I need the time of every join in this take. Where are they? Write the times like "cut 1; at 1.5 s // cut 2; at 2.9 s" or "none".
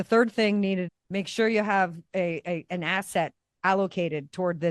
cut 1; at 0.9 s